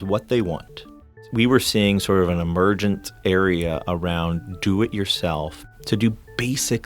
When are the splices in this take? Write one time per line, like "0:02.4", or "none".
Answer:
0:01.2
0:05.7

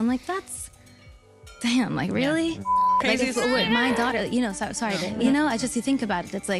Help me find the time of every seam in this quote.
0:01.6
0:02.7
0:05.1

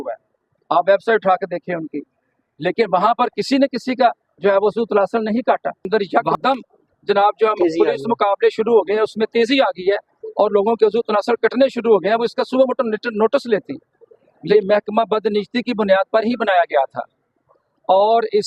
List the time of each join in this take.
0:05.9
0:14.5

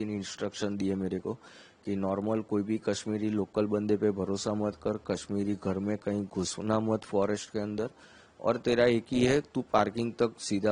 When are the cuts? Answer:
none

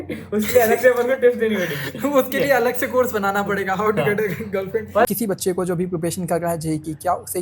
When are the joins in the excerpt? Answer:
0:05.1

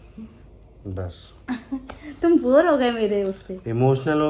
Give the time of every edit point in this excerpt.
none

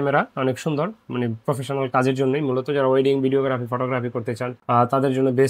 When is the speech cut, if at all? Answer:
none

